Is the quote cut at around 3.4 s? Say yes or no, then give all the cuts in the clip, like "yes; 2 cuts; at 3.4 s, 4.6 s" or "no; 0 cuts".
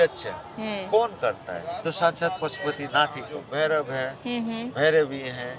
yes; 1 cut; at 3.4 s